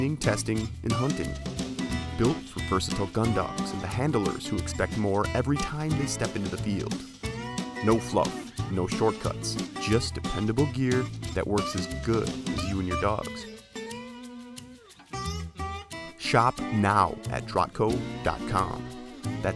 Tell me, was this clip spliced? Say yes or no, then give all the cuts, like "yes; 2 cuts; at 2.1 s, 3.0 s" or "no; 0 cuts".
no; 0 cuts